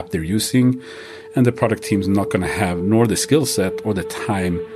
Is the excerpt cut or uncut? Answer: uncut